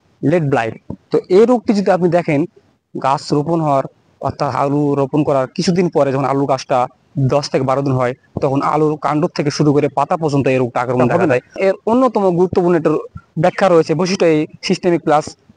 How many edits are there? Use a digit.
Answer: 1